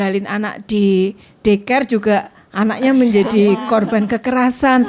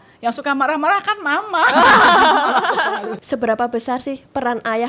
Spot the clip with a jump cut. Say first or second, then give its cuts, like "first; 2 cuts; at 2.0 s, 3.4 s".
second; 1 cut; at 3.2 s